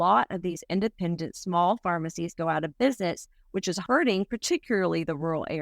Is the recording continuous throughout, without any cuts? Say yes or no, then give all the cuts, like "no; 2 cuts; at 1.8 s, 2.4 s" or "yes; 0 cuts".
no; 1 cut; at 3.8 s